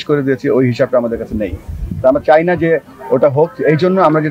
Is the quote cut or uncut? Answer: uncut